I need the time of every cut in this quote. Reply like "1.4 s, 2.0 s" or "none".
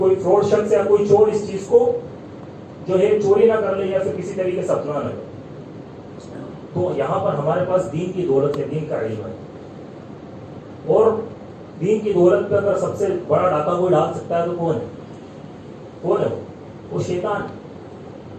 none

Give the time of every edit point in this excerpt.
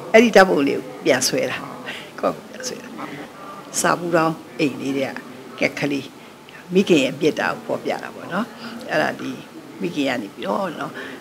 3.3 s

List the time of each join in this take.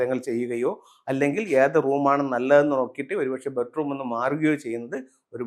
none

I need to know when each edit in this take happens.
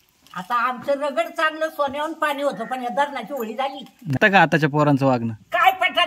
4.2 s

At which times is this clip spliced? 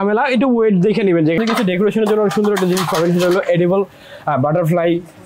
1.4 s

